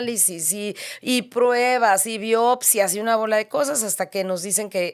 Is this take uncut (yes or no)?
yes